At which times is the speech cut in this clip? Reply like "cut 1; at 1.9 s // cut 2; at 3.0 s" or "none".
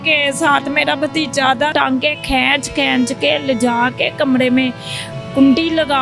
cut 1; at 1.7 s